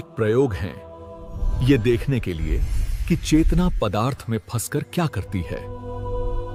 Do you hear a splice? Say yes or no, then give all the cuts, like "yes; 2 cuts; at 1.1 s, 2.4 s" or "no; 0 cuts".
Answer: no; 0 cuts